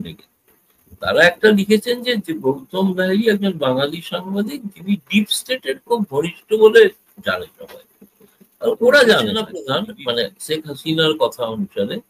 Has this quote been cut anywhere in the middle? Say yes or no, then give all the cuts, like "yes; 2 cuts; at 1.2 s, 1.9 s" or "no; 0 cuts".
yes; 1 cut; at 9.6 s